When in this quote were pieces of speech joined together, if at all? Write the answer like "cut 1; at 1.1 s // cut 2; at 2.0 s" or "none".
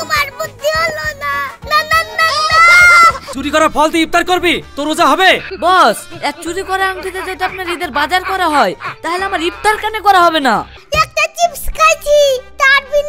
cut 1; at 3.3 s // cut 2; at 5.5 s // cut 3; at 10.7 s